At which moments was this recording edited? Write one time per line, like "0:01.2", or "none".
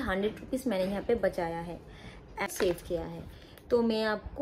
0:02.5